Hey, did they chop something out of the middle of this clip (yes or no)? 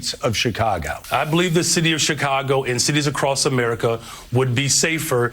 yes